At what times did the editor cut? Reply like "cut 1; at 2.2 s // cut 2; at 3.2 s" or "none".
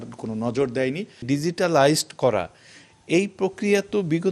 cut 1; at 1.2 s

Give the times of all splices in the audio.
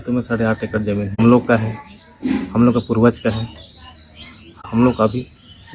cut 1; at 1.1 s // cut 2; at 4.6 s

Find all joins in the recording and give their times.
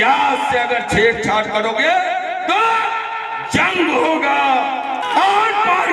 cut 1; at 5.0 s

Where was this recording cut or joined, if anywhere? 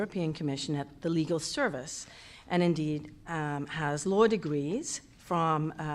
cut 1; at 3.7 s

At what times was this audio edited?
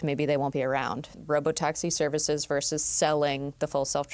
cut 1; at 1.1 s

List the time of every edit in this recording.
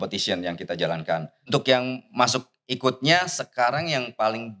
cut 1; at 1.5 s

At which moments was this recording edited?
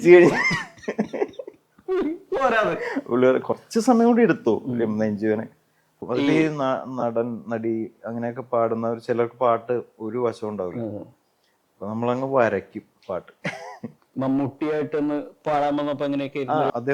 cut 1; at 6.0 s // cut 2; at 14.1 s

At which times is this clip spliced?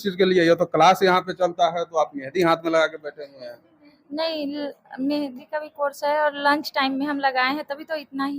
none

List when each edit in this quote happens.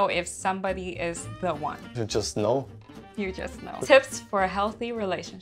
cut 1; at 1.8 s // cut 2; at 3.6 s

